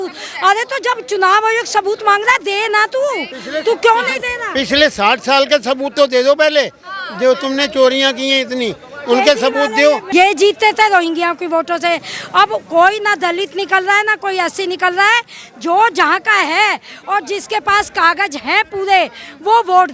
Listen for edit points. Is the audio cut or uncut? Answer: cut